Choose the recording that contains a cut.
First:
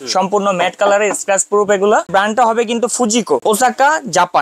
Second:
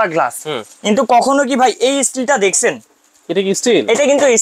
first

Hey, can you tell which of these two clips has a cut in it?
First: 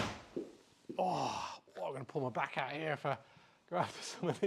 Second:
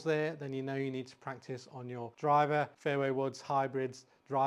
second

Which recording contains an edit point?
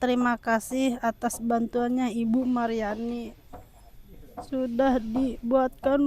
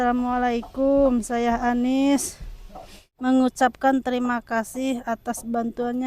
second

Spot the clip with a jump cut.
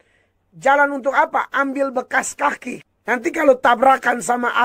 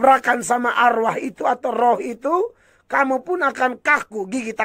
first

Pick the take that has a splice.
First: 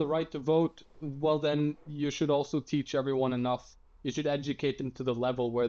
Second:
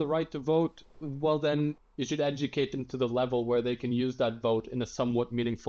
second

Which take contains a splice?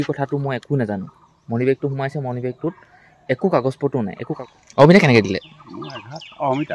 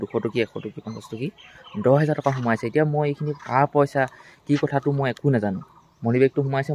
first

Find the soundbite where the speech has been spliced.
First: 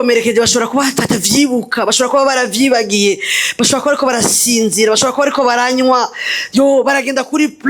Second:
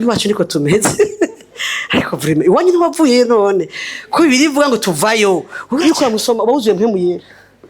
second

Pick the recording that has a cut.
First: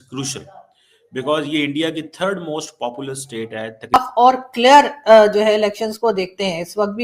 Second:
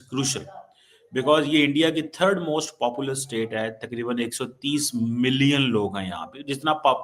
first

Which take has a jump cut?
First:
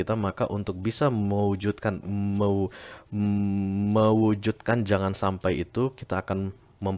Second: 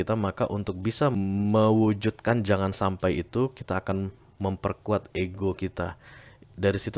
second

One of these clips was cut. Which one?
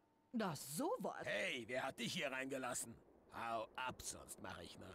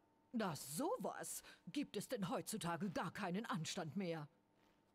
first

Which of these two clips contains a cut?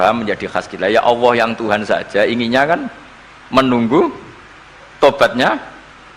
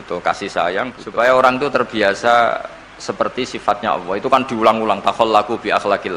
second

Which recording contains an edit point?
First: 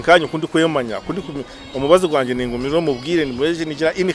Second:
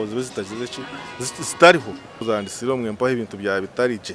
second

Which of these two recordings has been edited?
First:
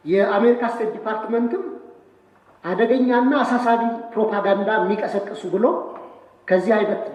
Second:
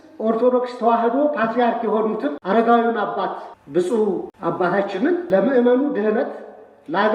second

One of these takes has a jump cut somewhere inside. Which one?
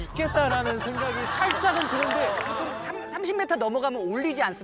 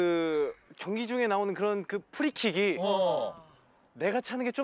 first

